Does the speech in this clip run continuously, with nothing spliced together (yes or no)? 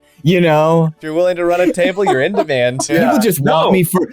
no